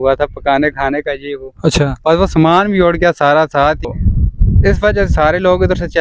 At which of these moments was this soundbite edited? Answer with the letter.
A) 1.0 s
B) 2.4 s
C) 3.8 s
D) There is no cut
C